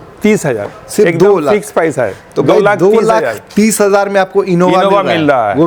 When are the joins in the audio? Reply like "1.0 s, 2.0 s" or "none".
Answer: none